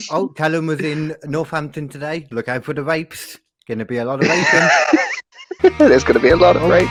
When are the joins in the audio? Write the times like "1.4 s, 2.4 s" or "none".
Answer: none